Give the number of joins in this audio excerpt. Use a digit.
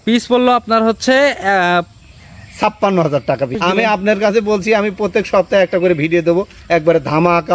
1